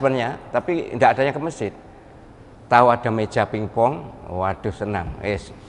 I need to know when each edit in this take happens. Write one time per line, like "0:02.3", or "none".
none

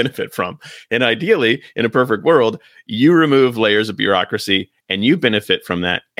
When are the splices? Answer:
none

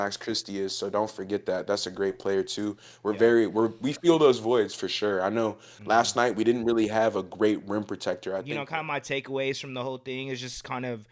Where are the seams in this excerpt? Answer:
0:08.5

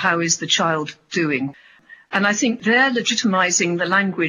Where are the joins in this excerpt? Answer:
0:01.5

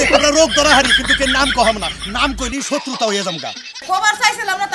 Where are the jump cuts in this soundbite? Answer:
0:03.8

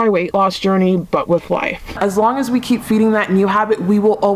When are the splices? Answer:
0:02.0

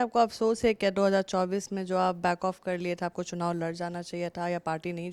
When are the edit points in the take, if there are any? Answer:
none

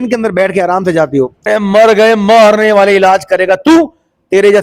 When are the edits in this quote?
0:01.5

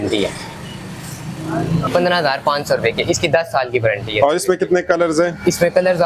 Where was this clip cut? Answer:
0:01.9

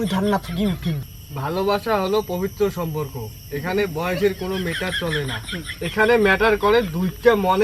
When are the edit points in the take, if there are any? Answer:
0:01.1

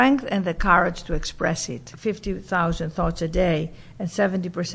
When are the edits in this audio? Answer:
0:01.9

